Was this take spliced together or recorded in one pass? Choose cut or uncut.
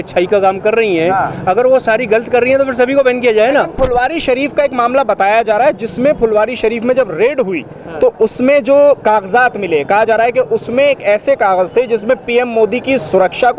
uncut